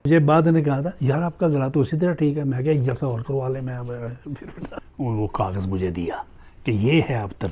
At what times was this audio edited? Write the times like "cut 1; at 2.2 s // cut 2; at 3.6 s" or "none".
cut 1; at 4.8 s